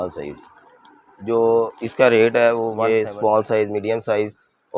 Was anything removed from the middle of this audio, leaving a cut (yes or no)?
yes